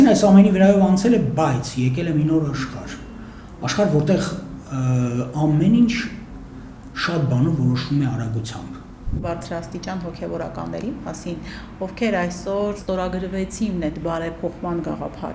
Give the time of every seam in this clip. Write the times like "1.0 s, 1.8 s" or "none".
9.2 s